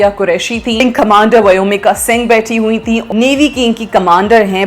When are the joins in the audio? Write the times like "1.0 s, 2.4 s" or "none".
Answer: 0.8 s, 3.1 s